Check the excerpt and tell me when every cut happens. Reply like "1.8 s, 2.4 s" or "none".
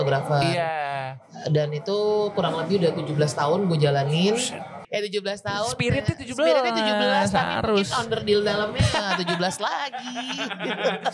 4.7 s